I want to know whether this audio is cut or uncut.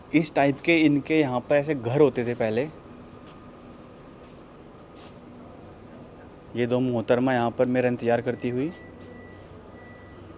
uncut